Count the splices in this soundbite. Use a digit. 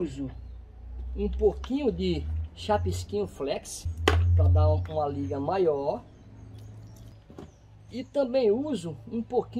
2